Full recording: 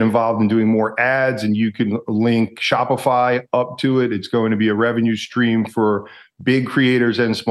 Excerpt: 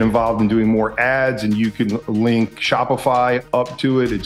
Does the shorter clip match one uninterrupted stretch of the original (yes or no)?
yes